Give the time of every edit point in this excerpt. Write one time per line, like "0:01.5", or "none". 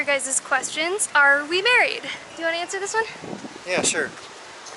0:01.0